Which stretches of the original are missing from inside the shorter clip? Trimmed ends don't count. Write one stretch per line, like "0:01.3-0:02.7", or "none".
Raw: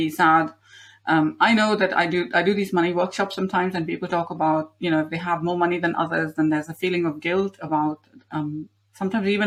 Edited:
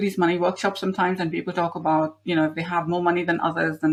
none